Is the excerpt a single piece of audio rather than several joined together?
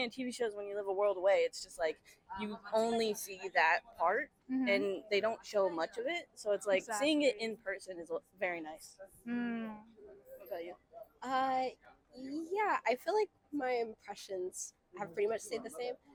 yes; 0 cuts

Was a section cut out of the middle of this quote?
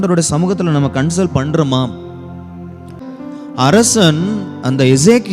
yes; 1 cut; at 3.0 s

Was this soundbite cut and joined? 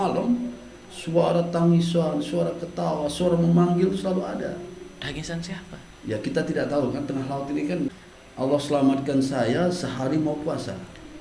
yes; 1 cut; at 7.9 s

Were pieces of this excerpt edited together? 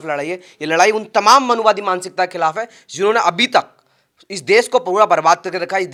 no; 0 cuts

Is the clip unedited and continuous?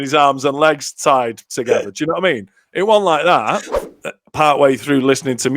no; 1 cut; at 3.7 s

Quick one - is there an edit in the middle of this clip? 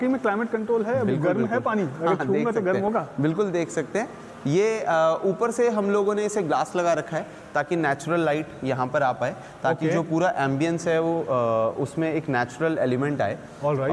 no; 0 cuts

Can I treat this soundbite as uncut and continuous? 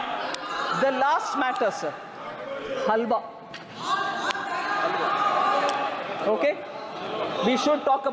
yes; 0 cuts

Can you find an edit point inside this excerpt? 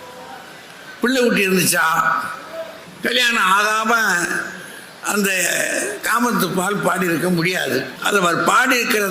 yes; 2 cuts; at 2.8 s, 8.0 s

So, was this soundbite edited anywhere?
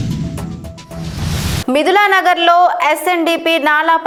no; 0 cuts

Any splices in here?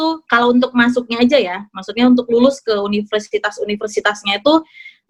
no; 0 cuts

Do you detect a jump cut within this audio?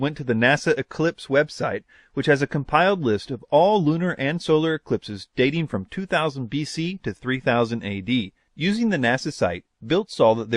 yes; 1 cut; at 6.8 s

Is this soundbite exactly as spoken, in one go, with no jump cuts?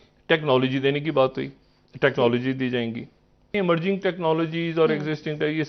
no; 1 cut; at 3.5 s

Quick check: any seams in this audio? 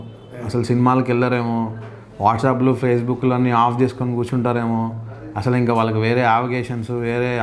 no; 0 cuts

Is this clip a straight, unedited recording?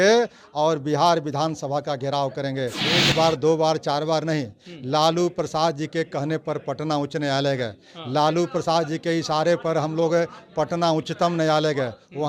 no; 1 cut; at 2.8 s

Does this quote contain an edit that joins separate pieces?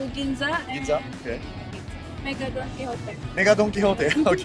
no; 0 cuts

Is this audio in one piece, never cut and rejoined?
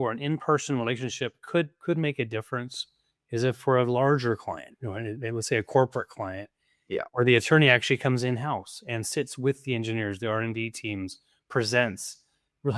yes; 0 cuts

